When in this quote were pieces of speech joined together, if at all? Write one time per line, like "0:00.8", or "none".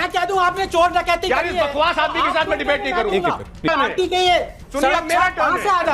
0:03.7